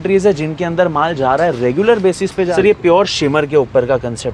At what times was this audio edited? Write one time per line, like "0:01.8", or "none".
0:02.5